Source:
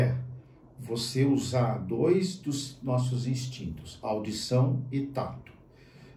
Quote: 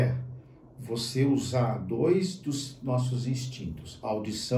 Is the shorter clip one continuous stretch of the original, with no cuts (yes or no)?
yes